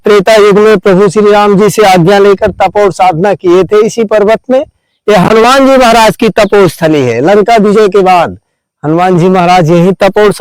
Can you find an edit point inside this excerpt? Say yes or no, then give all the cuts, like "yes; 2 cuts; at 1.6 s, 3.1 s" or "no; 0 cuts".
no; 0 cuts